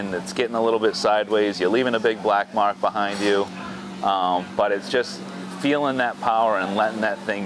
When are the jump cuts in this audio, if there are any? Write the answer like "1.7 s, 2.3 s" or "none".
none